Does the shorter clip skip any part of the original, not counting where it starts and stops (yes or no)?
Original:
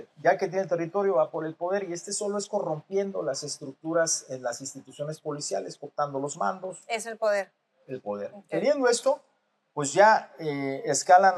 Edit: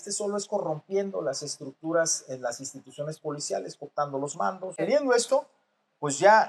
yes